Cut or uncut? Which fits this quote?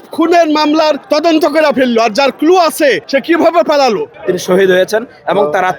cut